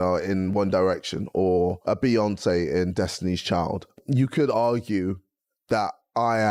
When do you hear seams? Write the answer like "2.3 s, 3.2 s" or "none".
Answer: none